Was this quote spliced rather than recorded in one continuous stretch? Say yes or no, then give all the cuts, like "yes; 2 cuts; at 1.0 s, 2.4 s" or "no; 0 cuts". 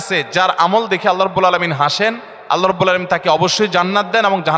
no; 0 cuts